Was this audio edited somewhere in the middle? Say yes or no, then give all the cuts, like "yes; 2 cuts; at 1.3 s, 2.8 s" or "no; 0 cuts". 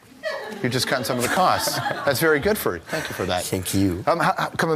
no; 0 cuts